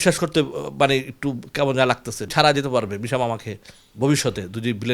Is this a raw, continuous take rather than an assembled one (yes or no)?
no